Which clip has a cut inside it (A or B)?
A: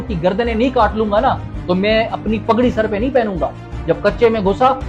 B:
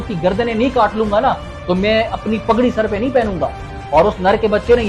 A